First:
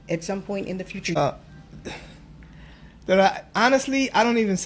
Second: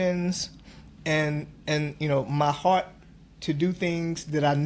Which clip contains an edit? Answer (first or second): first